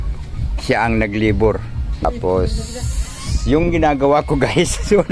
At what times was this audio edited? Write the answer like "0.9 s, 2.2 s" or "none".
2.0 s

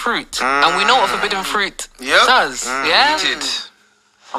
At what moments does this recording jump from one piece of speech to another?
none

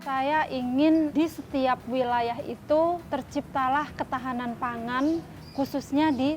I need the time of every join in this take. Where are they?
1.1 s, 3.0 s

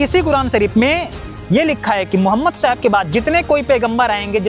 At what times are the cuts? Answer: none

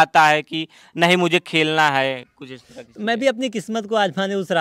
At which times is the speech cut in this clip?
none

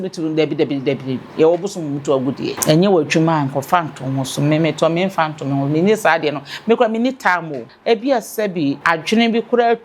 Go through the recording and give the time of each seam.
2.6 s, 7.6 s, 8.8 s

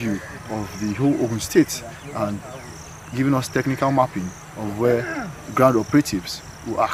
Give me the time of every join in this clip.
none

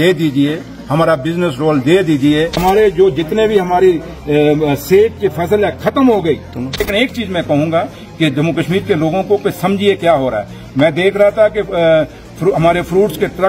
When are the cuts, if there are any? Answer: 2.6 s, 6.9 s

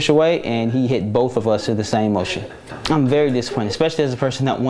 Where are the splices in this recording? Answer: 2.7 s

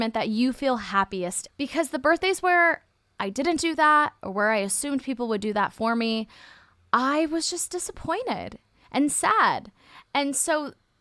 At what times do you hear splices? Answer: 1.4 s

